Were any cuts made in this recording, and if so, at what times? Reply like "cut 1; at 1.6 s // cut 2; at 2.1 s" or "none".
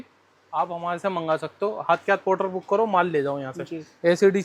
none